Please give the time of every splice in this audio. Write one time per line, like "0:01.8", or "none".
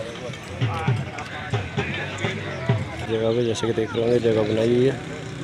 0:03.1